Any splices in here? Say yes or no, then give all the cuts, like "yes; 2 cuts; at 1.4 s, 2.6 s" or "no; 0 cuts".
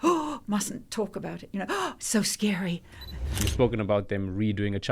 yes; 1 cut; at 3.5 s